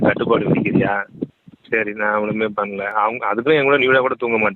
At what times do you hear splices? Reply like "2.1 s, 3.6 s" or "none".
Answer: 1.3 s